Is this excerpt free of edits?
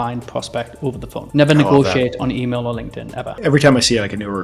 yes; 0 cuts

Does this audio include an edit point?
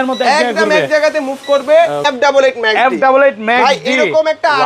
yes; 1 cut; at 2.1 s

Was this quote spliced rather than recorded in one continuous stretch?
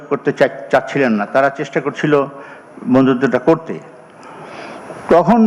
no; 0 cuts

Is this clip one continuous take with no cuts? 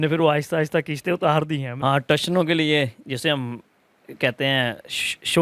no; 1 cut; at 1.7 s

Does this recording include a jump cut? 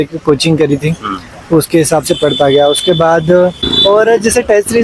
yes; 1 cut; at 3.7 s

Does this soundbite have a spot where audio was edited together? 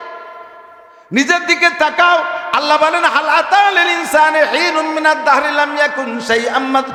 no; 0 cuts

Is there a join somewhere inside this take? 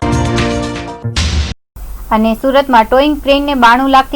yes; 1 cut; at 1.3 s

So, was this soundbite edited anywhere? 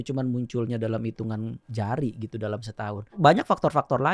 yes; 2 cuts; at 1.6 s, 3.2 s

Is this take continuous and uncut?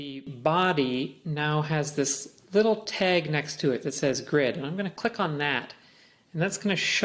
no; 1 cut; at 5.1 s

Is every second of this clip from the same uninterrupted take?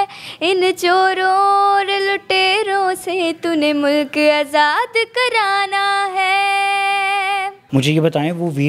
no; 1 cut; at 7.6 s

